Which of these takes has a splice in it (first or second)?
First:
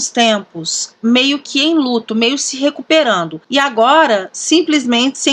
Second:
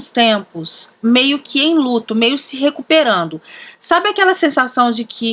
first